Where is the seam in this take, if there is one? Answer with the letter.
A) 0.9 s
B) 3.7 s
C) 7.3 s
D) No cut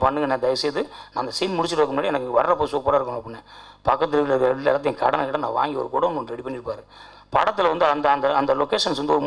D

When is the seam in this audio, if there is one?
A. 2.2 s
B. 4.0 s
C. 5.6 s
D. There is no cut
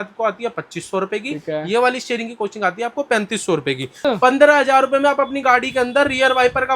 B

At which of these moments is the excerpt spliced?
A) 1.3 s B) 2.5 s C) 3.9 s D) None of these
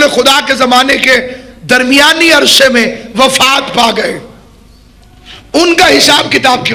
D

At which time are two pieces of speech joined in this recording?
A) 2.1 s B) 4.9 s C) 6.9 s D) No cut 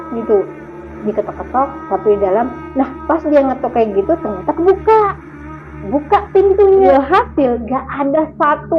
C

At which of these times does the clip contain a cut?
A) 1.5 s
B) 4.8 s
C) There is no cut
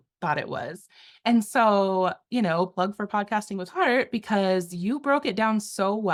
C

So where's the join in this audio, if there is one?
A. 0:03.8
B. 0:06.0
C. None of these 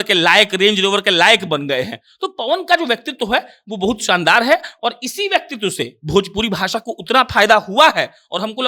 C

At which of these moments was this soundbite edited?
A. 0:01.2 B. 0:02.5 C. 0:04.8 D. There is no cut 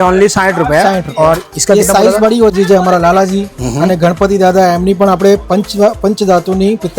B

